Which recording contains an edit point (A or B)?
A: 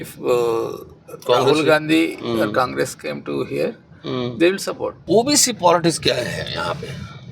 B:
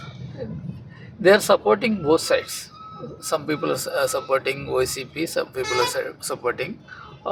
A